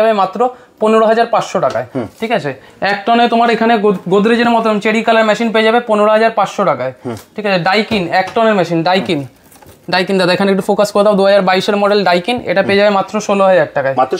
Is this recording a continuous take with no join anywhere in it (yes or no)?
yes